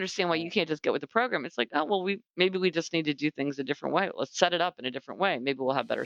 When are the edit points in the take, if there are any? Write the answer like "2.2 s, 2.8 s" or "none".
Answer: none